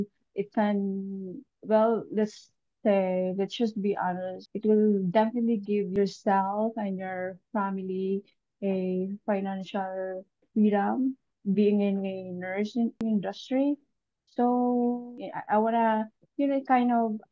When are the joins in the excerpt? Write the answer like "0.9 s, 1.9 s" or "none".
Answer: 5.9 s, 11.4 s, 13.0 s